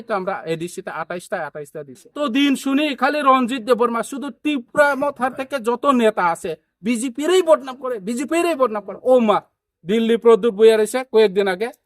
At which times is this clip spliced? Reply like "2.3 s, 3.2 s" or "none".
2.1 s